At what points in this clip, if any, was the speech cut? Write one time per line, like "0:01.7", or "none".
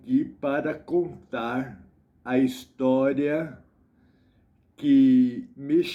none